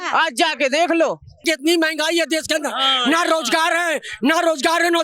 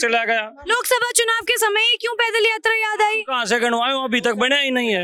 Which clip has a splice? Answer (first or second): first